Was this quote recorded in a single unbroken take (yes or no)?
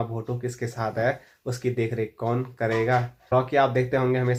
yes